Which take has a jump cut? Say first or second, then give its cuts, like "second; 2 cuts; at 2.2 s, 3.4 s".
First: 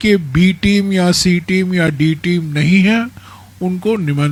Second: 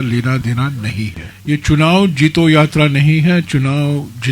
second; 1 cut; at 1.2 s